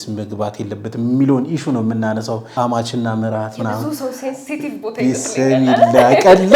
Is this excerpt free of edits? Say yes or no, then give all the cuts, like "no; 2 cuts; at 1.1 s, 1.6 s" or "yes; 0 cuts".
no; 1 cut; at 2.5 s